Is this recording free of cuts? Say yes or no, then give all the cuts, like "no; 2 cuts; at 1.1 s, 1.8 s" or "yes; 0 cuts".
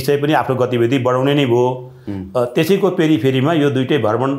yes; 0 cuts